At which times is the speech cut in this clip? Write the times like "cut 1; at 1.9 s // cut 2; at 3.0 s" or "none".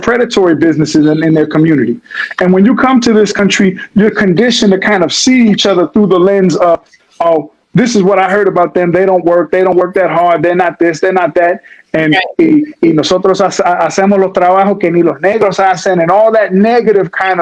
none